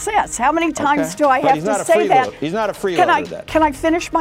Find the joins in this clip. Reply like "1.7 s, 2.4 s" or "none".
none